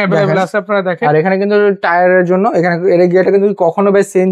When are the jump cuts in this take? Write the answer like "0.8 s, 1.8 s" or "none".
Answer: none